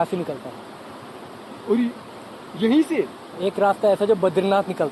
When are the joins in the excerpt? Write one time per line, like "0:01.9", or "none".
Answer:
none